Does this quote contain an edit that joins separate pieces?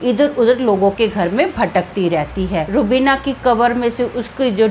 yes; 1 cut; at 2.7 s

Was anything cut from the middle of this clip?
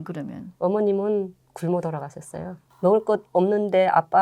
yes; 1 cut; at 2.6 s

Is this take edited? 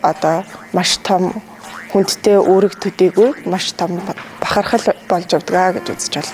yes; 1 cut; at 5.0 s

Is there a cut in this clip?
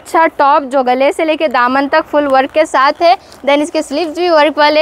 no; 0 cuts

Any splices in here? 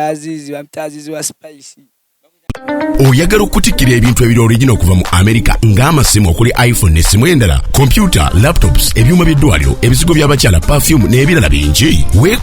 yes; 1 cut; at 2.4 s

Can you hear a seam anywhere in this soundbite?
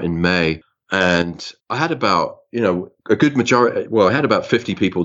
no; 0 cuts

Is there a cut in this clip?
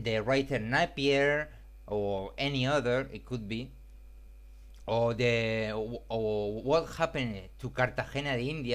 yes; 1 cut; at 3.2 s

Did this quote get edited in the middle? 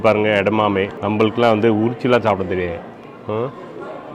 yes; 1 cut; at 1.0 s

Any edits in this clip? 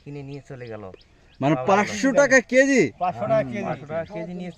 no; 0 cuts

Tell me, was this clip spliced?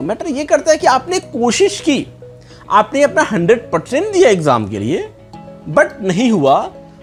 no; 0 cuts

